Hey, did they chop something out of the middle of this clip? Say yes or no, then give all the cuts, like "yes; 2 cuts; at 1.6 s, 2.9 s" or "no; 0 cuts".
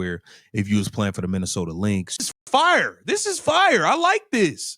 yes; 1 cut; at 2.3 s